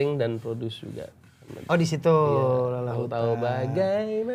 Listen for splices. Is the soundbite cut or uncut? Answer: uncut